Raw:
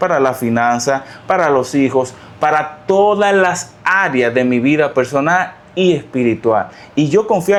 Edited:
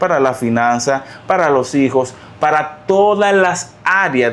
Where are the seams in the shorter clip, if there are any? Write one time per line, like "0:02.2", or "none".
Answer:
none